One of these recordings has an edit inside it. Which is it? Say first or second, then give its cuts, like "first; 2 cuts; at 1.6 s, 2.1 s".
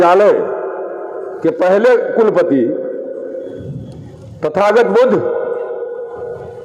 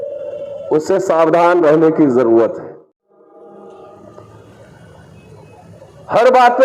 second; 1 cut; at 2.6 s